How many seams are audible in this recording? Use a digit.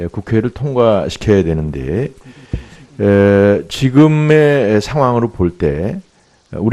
0